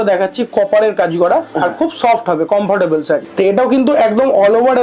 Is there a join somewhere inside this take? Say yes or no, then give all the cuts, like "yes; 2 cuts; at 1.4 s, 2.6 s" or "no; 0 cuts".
yes; 1 cut; at 3.3 s